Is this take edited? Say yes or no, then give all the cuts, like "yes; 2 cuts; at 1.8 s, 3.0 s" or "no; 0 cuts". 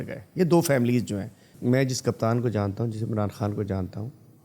yes; 1 cut; at 1.5 s